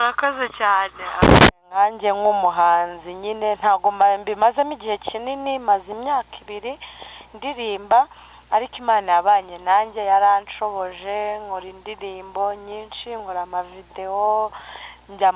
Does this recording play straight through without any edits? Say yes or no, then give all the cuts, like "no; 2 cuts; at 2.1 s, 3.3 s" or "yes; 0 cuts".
no; 1 cut; at 1.2 s